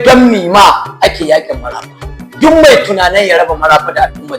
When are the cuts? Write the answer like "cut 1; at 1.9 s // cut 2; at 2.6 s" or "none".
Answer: cut 1; at 2.3 s

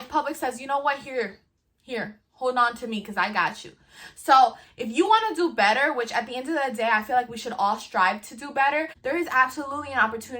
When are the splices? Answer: cut 1; at 8.9 s

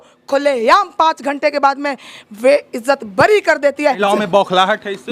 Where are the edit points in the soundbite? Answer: cut 1; at 4.0 s

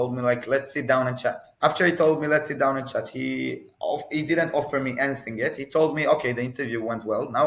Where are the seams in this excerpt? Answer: cut 1; at 1.5 s

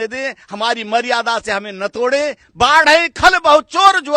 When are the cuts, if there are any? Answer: cut 1; at 2.4 s

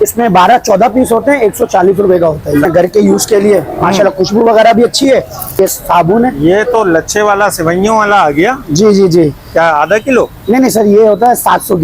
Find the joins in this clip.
cut 1; at 2.6 s // cut 2; at 5.6 s

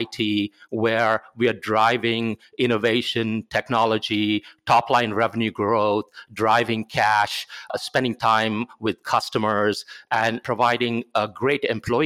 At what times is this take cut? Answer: cut 1; at 7.7 s // cut 2; at 10.4 s

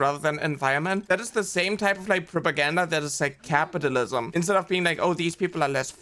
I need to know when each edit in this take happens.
cut 1; at 1.0 s // cut 2; at 4.3 s

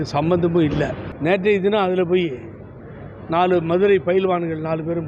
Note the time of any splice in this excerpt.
cut 1; at 1.0 s

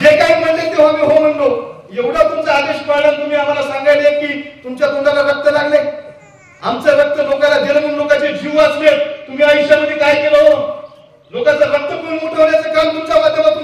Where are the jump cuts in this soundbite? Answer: none

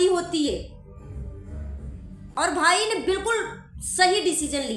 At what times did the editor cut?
cut 1; at 2.2 s

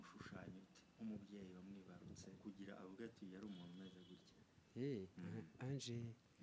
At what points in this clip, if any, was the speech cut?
cut 1; at 2.3 s

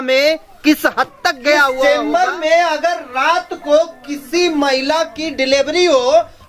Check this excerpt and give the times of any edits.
cut 1; at 1.8 s

